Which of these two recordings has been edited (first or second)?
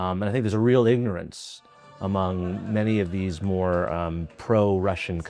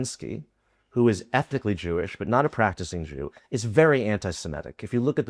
second